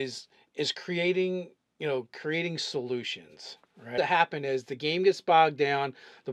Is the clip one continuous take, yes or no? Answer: yes